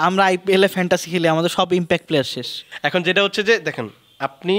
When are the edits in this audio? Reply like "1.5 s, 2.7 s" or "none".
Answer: none